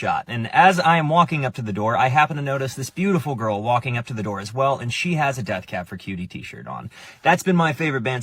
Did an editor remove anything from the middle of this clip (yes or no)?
yes